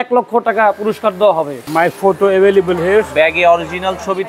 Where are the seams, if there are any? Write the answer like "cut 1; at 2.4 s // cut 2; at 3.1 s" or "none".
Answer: cut 1; at 1.6 s